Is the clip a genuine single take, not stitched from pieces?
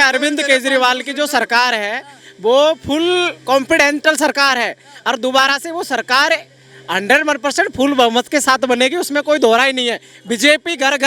yes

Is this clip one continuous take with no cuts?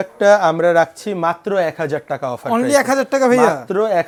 yes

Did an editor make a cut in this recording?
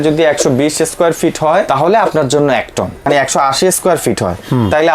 yes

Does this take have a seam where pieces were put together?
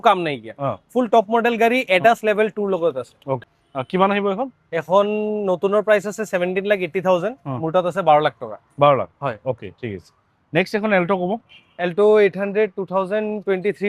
no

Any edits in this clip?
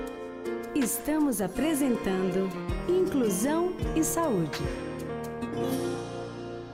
no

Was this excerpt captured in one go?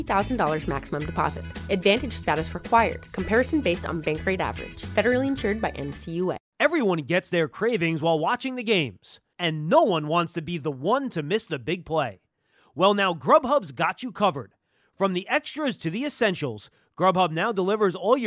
no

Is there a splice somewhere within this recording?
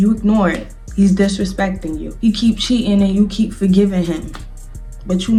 no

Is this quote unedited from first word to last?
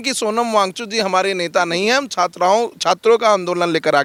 yes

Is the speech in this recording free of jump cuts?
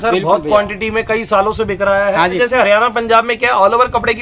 no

